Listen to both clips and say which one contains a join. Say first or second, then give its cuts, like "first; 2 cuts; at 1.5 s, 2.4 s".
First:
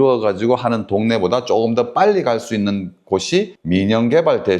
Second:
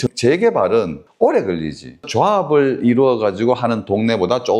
second; 1 cut; at 2.1 s